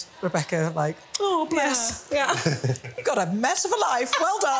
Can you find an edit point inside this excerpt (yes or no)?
no